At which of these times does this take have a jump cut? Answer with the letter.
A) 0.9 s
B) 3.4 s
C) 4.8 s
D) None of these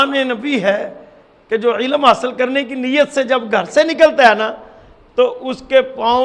D